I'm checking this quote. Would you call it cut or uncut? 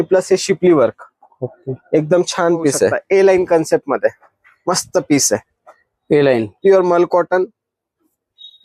cut